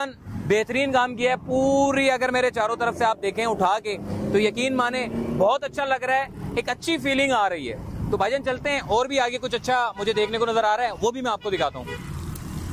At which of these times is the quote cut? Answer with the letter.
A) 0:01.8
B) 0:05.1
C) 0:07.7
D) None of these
D